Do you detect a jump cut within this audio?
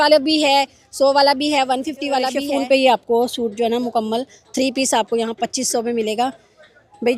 yes; 1 cut; at 2.4 s

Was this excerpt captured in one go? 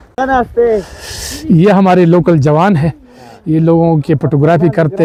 yes; 0 cuts

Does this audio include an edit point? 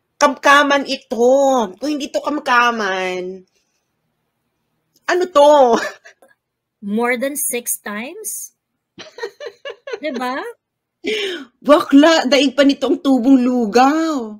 yes; 1 cut; at 6.3 s

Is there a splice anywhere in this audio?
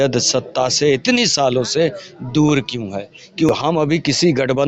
yes; 1 cut; at 3.5 s

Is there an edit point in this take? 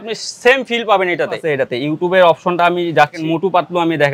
yes; 2 cuts; at 1.5 s, 3.2 s

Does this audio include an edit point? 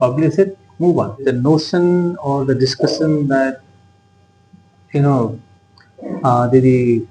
yes; 1 cut; at 1.2 s

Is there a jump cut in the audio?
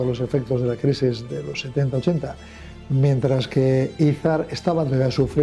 no; 0 cuts

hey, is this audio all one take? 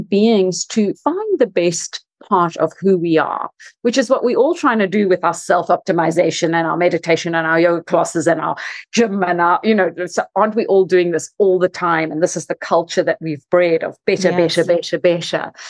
no; 1 cut; at 1.0 s

